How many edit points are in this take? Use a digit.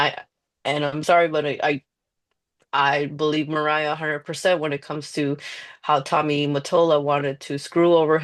0